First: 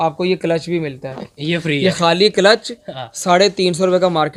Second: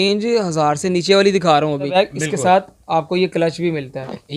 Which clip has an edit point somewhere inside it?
second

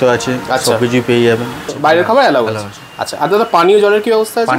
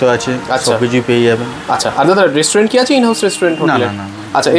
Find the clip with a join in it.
first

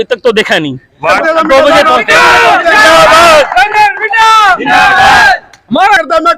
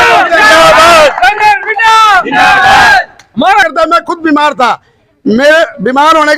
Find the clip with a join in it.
first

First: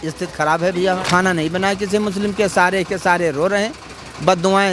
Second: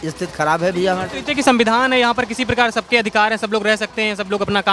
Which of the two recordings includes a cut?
first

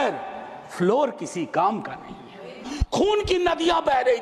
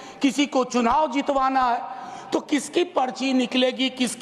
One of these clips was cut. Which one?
first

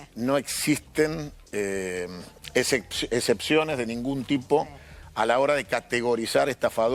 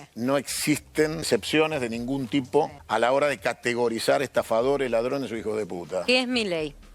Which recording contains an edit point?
second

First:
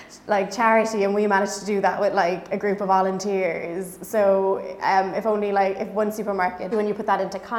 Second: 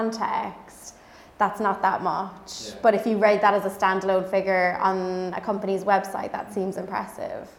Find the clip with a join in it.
first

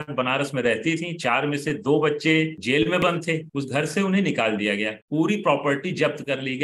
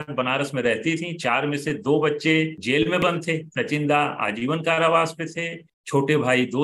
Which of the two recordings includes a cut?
first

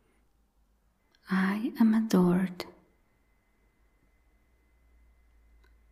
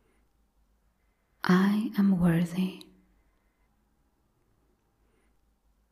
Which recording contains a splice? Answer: first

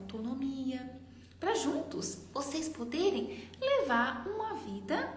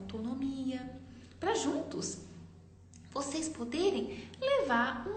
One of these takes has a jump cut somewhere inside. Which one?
first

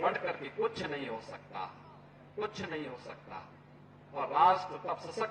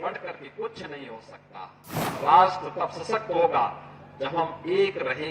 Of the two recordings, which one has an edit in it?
second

